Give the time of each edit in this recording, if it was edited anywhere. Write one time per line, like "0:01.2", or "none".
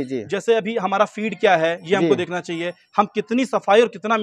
none